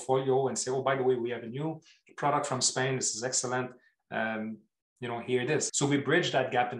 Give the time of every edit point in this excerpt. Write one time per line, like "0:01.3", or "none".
0:05.7